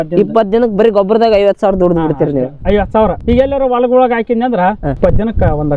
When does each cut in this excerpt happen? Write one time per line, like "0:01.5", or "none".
0:03.2
0:05.0